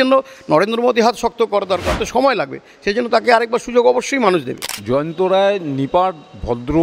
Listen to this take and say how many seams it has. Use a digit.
2